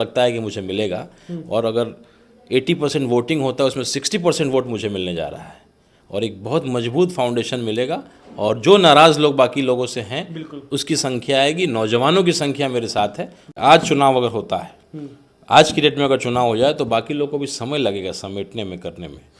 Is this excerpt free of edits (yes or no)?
no